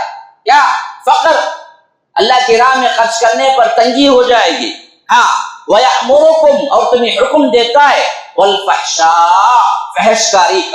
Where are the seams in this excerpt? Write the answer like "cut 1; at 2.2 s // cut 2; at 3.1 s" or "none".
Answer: none